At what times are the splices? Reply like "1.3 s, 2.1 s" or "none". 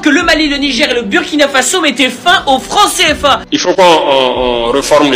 3.4 s